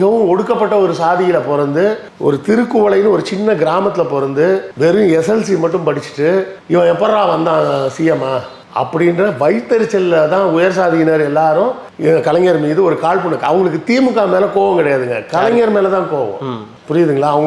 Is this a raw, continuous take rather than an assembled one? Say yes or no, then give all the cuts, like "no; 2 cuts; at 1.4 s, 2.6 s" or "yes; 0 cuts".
yes; 0 cuts